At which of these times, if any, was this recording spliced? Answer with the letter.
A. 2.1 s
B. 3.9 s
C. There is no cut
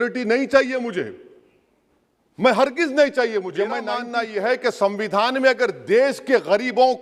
B